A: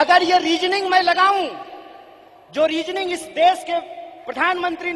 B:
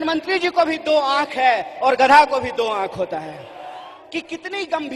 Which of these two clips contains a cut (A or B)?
B